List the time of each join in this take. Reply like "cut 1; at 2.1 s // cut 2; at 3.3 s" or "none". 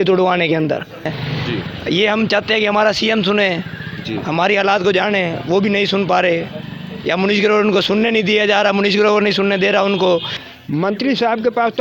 cut 1; at 1.2 s // cut 2; at 10.3 s